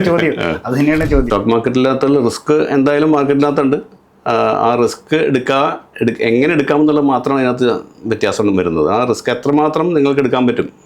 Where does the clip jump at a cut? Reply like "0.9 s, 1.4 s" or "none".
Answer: 1.3 s

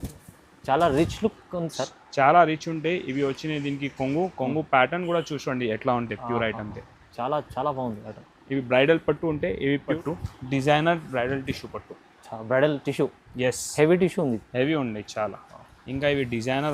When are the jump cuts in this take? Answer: 10.0 s

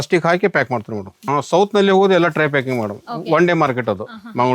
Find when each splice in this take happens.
1.2 s

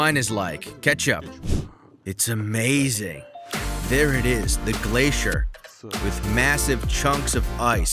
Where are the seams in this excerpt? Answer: 1.4 s

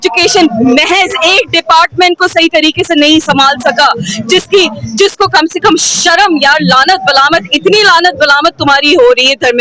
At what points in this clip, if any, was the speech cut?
none

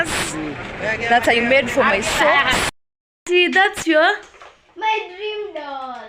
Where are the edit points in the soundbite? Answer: 2.7 s

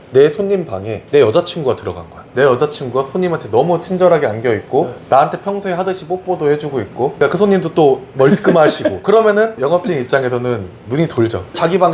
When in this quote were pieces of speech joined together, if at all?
2.2 s

